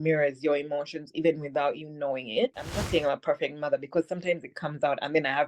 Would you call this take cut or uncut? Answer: cut